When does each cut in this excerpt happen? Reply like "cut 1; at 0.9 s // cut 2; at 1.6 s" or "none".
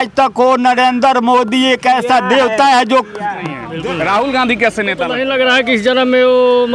cut 1; at 3.7 s // cut 2; at 5.2 s